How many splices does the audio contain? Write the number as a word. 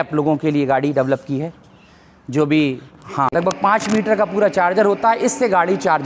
one